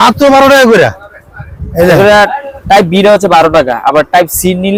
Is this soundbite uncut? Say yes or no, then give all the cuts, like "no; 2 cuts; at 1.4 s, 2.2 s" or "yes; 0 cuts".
yes; 0 cuts